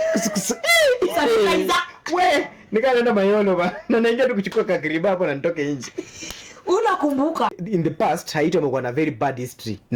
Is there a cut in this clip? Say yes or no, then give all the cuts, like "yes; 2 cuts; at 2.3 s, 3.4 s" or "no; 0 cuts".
yes; 1 cut; at 7.6 s